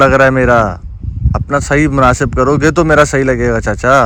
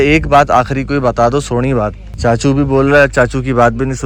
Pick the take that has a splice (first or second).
second